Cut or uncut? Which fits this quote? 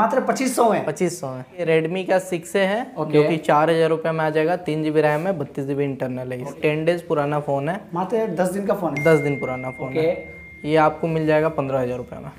cut